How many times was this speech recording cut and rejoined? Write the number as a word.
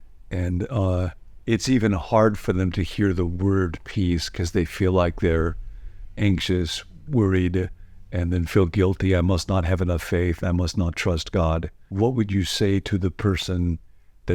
one